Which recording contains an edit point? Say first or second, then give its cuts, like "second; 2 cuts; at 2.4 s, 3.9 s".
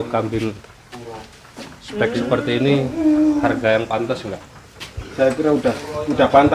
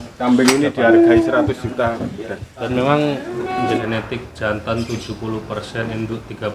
second; 1 cut; at 3.6 s